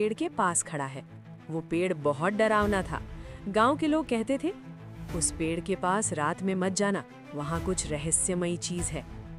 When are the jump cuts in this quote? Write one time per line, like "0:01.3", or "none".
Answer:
none